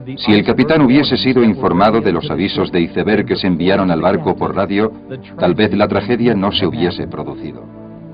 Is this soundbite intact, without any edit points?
yes; 0 cuts

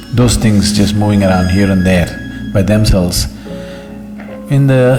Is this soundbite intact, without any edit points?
yes; 0 cuts

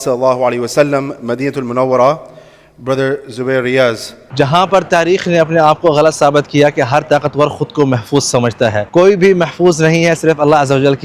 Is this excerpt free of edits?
no; 2 cuts; at 4.3 s, 8.8 s

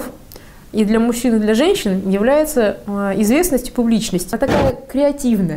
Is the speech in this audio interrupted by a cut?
yes; 1 cut; at 4.3 s

